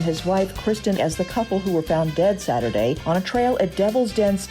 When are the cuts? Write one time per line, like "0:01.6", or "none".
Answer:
0:01.0